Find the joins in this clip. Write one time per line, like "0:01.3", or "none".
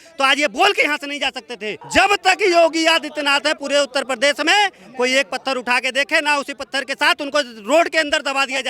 0:01.8